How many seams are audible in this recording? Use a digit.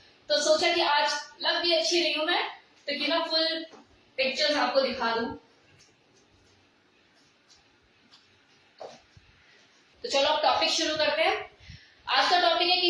1